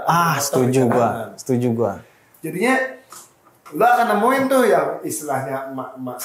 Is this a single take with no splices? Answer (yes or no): yes